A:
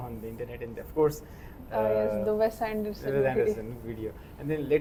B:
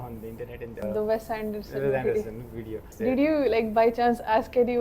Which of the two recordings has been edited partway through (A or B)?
B